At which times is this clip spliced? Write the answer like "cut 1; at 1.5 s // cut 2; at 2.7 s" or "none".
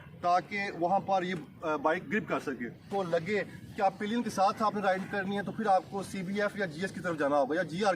cut 1; at 2.9 s